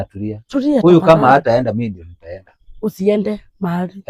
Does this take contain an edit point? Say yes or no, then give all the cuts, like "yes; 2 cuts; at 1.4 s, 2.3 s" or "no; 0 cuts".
no; 0 cuts